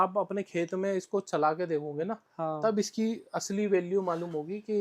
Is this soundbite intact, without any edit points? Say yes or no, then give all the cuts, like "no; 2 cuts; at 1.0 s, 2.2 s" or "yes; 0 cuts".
yes; 0 cuts